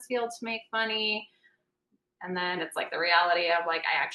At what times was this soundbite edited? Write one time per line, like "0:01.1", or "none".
none

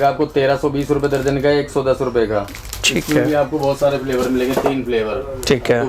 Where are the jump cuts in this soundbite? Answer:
none

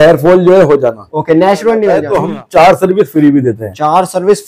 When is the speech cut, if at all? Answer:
0:02.1

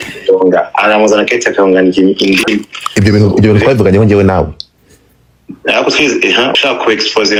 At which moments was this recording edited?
none

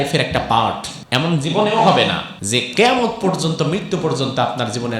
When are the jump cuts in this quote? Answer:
0:00.9
0:02.3

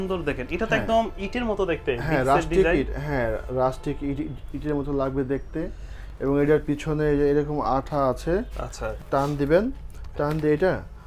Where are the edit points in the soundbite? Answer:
none

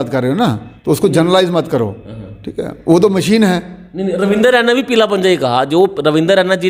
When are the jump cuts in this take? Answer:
none

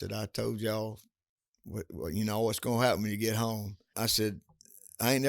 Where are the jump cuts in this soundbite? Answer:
0:03.9

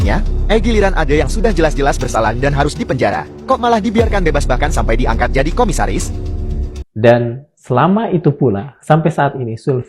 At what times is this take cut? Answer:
0:06.8

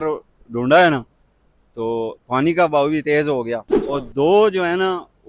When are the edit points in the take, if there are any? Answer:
0:03.7

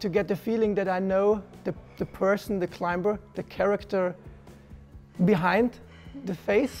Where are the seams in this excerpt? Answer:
none

